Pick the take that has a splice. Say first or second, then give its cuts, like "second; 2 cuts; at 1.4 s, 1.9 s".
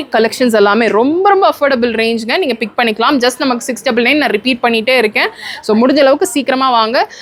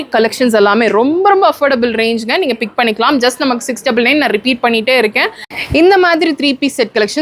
second; 1 cut; at 5.5 s